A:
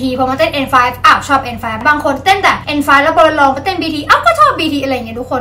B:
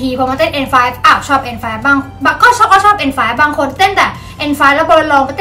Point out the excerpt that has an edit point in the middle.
A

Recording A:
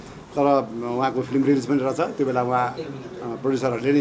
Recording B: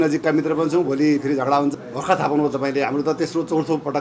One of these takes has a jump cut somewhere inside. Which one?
B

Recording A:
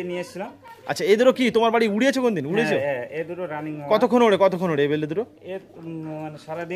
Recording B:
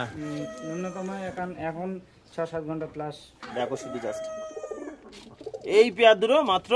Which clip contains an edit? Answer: B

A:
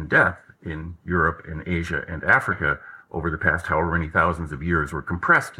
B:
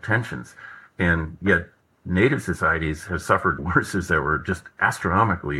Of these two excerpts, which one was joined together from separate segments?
B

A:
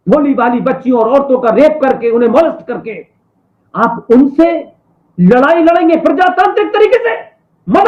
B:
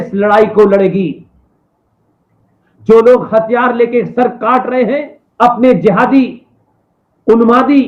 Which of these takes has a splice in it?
B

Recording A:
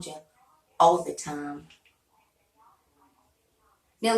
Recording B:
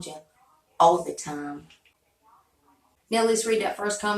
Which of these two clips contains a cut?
B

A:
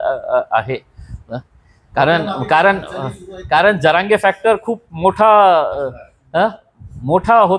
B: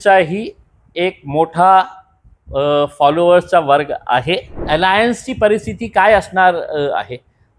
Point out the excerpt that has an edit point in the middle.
B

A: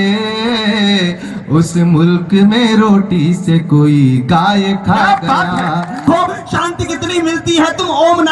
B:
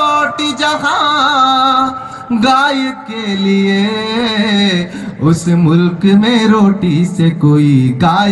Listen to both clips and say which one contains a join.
A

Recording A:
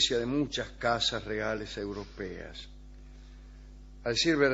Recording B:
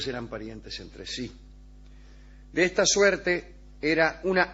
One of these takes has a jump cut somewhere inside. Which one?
B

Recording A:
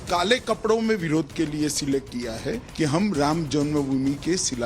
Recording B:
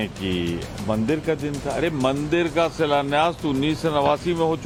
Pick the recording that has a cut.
A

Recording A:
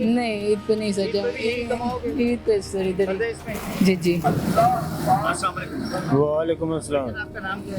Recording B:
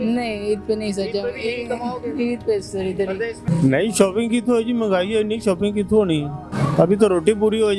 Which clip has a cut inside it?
B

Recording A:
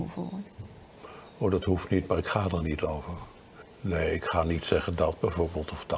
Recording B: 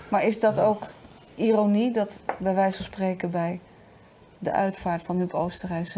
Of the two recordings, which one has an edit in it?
A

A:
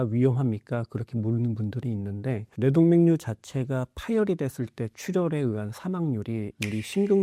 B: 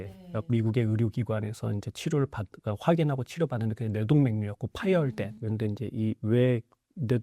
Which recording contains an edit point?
B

